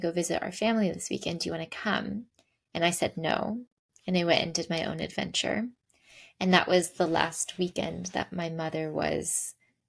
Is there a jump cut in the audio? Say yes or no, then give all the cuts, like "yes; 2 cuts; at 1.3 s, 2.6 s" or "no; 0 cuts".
no; 0 cuts